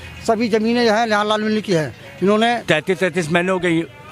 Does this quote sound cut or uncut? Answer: cut